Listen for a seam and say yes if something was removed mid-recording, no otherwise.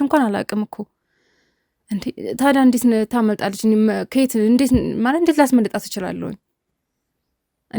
no